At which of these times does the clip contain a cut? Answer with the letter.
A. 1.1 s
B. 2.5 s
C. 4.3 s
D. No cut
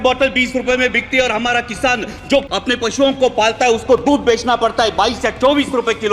B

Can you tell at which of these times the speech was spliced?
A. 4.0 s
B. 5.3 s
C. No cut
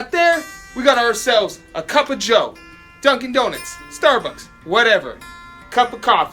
C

